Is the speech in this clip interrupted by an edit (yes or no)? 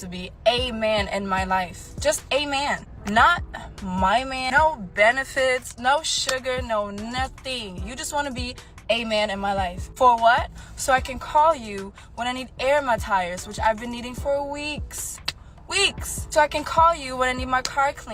no